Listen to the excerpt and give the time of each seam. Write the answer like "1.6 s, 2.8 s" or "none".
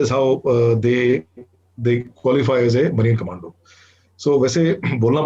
none